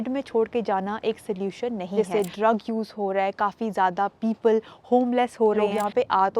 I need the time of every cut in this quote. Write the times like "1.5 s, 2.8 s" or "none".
2.0 s, 5.6 s